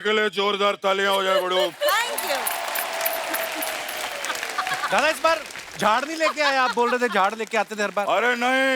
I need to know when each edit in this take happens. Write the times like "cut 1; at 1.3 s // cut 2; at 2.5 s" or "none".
cut 1; at 4.6 s